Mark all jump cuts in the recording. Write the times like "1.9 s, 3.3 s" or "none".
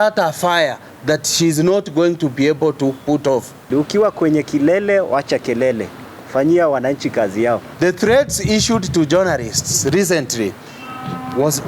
3.7 s, 7.7 s